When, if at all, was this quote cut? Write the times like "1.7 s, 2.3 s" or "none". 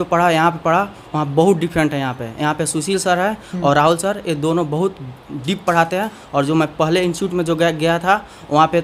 none